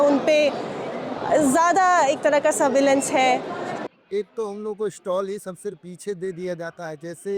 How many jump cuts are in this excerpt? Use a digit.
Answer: 1